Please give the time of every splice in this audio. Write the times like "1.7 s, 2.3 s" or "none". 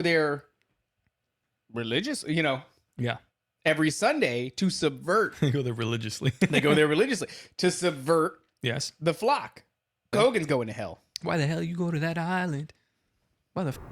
10.1 s

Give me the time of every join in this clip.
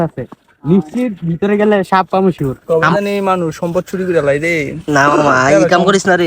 2.5 s

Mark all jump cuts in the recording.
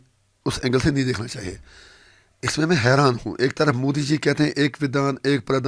none

